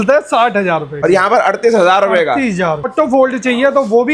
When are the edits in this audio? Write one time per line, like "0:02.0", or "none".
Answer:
0:01.0
0:02.9